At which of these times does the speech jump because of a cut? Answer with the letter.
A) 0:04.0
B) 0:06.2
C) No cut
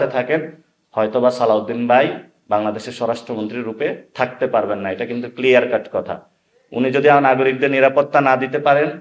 C